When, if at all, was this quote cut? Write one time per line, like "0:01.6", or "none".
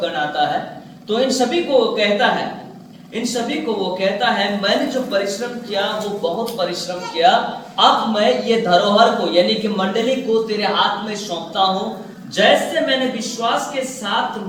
none